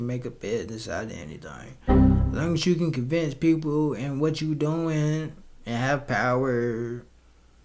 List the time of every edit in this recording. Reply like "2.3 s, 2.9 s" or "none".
none